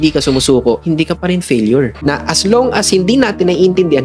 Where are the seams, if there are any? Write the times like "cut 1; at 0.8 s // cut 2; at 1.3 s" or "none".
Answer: cut 1; at 2.0 s